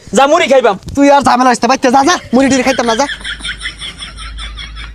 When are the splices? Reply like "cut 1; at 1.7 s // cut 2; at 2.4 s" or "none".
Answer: cut 1; at 3.1 s